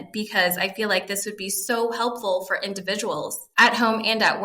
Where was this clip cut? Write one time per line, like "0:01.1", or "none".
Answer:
0:03.4